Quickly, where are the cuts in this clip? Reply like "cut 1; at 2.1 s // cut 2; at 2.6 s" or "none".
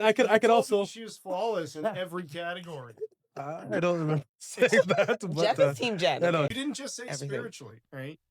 cut 1; at 6.5 s